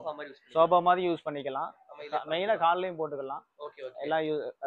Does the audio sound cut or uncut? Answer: uncut